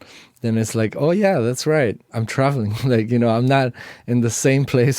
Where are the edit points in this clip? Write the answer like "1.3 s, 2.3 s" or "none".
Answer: 2.1 s